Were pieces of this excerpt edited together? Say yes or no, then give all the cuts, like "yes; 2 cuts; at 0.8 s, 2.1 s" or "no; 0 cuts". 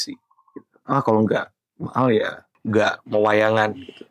yes; 1 cut; at 2.5 s